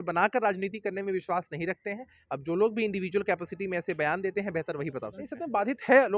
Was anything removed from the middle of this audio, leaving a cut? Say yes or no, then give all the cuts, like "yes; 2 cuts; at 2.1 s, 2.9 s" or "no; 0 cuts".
yes; 1 cut; at 5.2 s